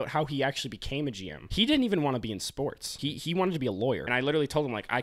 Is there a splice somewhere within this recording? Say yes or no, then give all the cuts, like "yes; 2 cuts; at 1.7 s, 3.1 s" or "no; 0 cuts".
yes; 3 cuts; at 1.3 s, 2.9 s, 4.0 s